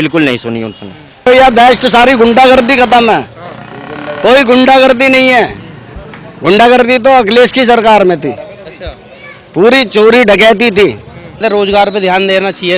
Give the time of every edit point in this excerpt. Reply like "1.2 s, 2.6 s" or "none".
1.3 s, 11.4 s

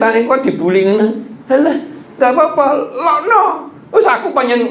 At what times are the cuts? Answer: none

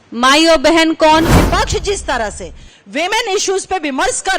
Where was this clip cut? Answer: 1.3 s

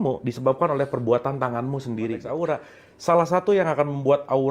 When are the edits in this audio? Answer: 2.3 s

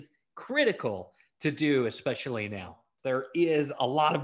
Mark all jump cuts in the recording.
2.9 s

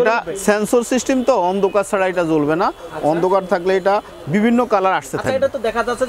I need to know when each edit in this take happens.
none

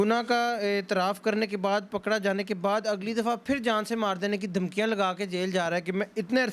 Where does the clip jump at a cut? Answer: none

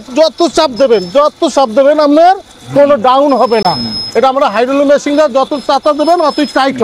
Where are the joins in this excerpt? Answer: none

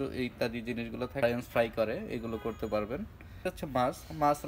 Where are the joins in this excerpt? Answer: 1.2 s, 3.5 s

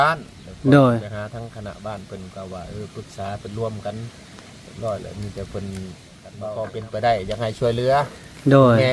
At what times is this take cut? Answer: 6.3 s

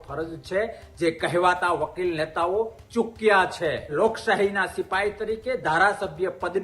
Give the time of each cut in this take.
3.9 s

